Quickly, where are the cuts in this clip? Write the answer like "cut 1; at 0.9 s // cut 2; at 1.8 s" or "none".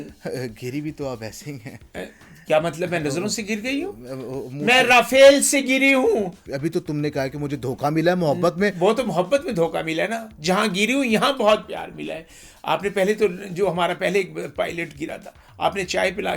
cut 1; at 6.4 s

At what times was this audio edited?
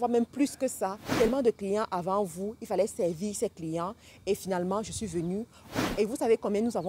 cut 1; at 1.1 s // cut 2; at 5.7 s

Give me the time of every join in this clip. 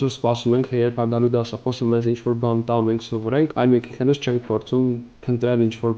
cut 1; at 3.5 s

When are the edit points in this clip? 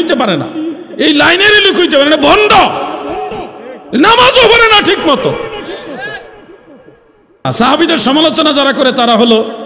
cut 1; at 7.5 s

